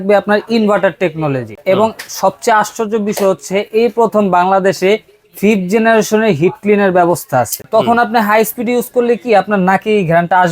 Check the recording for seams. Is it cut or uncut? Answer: cut